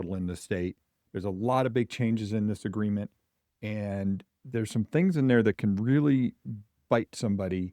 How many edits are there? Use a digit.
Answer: 1